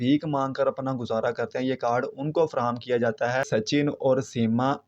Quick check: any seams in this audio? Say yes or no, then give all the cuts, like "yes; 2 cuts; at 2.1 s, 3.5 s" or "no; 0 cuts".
yes; 1 cut; at 3.5 s